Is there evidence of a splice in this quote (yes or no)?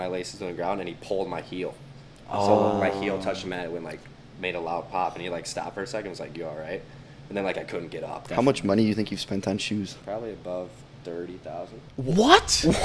yes